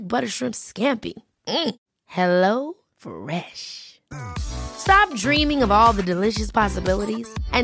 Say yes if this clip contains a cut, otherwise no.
no